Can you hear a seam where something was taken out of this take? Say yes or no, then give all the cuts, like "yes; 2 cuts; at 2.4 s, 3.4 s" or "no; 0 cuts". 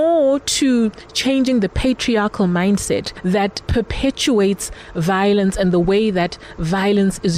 no; 0 cuts